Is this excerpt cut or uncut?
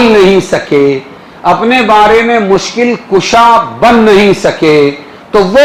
uncut